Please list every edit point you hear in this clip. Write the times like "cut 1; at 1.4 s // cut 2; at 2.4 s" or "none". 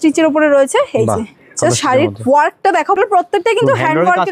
cut 1; at 3.0 s